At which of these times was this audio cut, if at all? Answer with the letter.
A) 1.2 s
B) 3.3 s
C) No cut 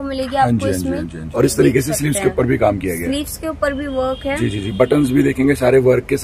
A